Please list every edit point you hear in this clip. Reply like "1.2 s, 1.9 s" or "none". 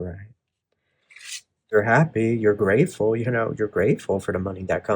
1.7 s